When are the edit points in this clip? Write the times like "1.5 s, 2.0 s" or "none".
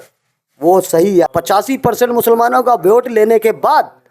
1.3 s